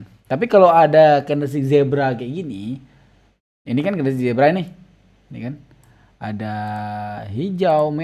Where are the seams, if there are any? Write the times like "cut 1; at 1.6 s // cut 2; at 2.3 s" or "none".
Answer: none